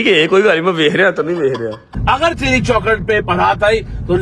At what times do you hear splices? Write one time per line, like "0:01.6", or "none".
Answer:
0:01.9